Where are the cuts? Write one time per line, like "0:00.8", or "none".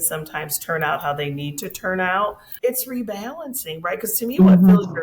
0:02.4